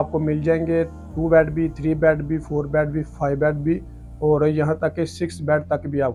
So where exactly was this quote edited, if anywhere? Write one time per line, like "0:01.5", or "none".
none